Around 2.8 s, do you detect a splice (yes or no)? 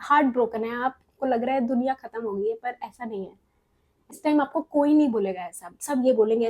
no